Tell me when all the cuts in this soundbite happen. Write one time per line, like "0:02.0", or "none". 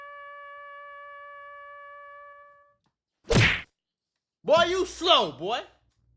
none